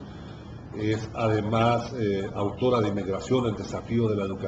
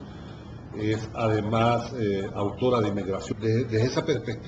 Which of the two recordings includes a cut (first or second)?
first